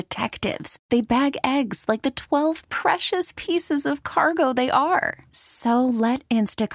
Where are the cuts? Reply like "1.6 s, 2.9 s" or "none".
none